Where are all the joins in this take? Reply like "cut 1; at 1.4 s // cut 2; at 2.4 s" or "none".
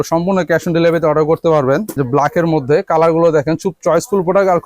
cut 1; at 1.9 s